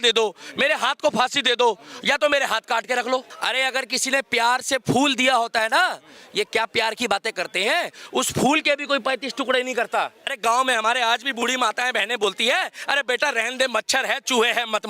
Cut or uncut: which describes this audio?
cut